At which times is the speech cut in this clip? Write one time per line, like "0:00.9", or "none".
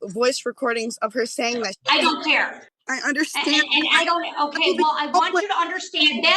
0:02.6